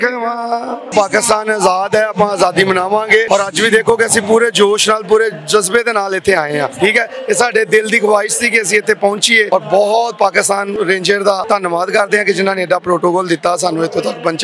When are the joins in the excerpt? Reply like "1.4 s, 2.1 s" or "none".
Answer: 0.9 s, 3.3 s, 6.7 s, 9.5 s, 10.7 s, 11.4 s